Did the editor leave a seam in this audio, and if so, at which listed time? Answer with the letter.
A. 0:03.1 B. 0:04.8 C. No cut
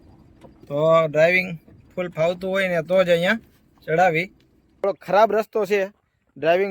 B